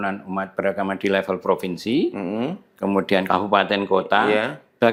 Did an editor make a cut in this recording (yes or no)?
no